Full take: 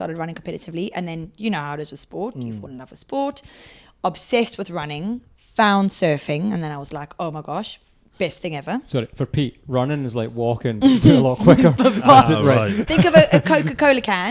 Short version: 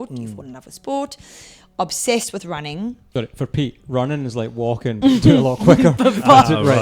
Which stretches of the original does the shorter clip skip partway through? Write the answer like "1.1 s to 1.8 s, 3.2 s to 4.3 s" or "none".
5.3 s to 8.9 s